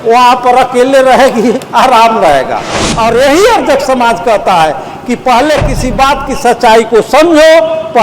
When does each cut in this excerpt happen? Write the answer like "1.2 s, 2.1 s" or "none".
2.8 s